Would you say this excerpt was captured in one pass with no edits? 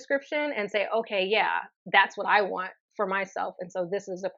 yes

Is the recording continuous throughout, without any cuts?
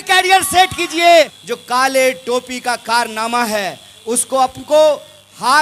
no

